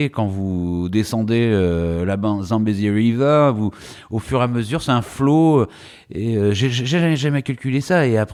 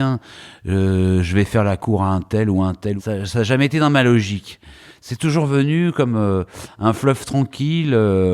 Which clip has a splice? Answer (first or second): second